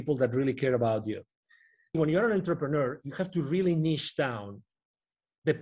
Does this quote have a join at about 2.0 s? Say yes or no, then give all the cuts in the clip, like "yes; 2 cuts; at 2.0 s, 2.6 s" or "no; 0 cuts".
yes; 1 cut; at 2.0 s